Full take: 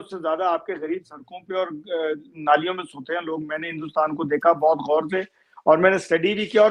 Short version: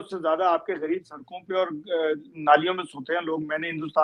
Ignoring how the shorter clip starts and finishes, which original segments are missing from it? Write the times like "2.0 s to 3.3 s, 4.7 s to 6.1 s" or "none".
none